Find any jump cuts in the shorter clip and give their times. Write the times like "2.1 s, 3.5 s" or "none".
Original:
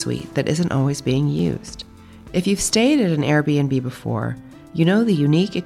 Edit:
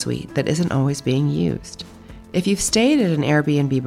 none